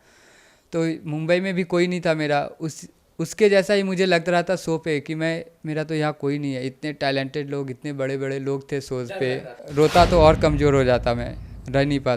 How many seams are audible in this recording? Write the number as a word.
one